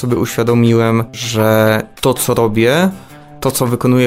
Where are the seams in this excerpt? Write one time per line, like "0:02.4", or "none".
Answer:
0:01.2